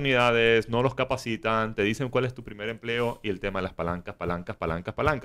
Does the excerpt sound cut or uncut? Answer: uncut